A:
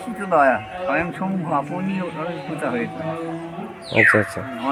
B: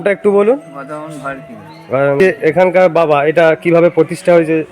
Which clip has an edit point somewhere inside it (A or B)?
B